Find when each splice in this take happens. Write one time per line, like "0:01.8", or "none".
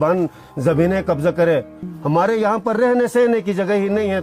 0:01.8